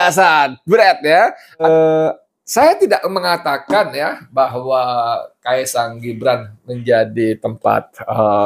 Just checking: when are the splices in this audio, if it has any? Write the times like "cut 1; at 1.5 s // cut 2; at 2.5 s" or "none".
cut 1; at 1.6 s